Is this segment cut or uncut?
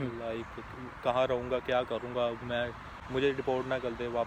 uncut